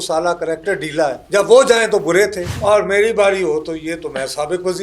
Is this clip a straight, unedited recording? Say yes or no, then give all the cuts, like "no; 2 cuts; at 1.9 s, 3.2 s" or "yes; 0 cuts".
no; 2 cuts; at 1.2 s, 2.5 s